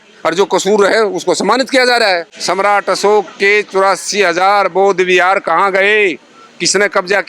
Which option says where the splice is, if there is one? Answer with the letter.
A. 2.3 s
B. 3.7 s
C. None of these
A